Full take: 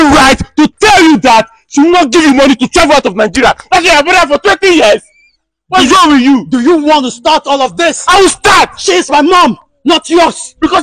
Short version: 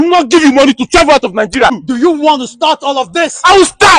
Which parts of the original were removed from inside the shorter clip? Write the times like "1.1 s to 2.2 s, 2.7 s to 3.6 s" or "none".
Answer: 3.6 s to 6.4 s